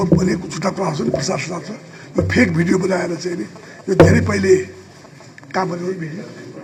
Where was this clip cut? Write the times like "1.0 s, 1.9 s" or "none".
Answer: none